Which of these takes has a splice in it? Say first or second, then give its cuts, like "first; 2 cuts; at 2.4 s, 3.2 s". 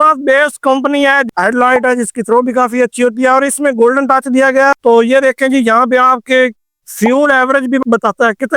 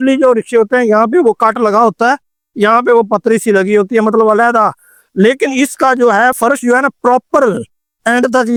first; 2 cuts; at 1.2 s, 4.7 s